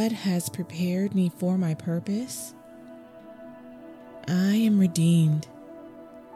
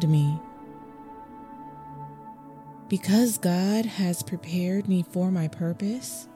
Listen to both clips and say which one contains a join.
first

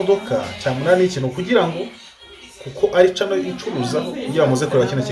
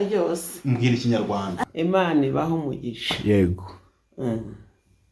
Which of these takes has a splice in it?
second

